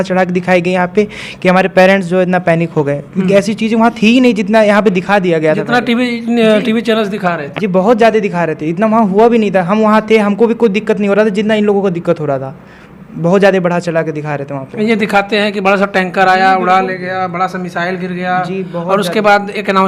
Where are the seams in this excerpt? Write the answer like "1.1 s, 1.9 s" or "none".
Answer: none